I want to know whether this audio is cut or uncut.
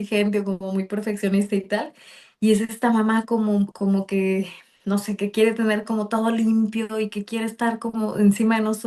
uncut